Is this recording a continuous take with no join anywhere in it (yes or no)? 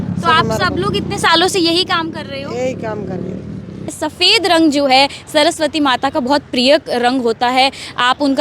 no